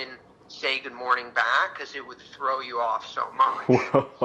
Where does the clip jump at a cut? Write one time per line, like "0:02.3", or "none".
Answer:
none